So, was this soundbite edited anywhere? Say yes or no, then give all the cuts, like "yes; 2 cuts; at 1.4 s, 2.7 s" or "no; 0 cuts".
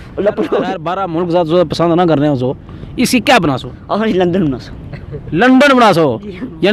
yes; 1 cut; at 0.9 s